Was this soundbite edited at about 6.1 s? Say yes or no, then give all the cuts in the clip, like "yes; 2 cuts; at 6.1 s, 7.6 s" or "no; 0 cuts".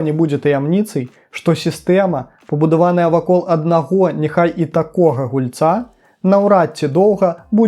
no; 0 cuts